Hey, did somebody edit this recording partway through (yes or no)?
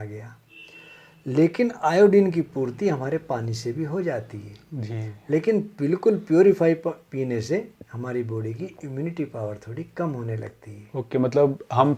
no